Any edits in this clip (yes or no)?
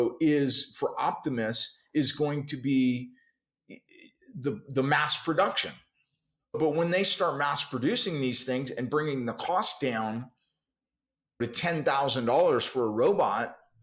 yes